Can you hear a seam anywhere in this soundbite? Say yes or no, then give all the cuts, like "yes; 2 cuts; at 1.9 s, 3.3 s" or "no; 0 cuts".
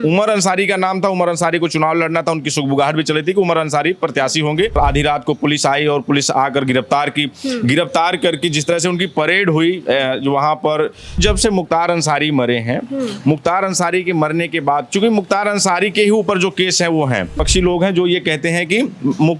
yes; 3 cuts; at 4.7 s, 11.2 s, 17.4 s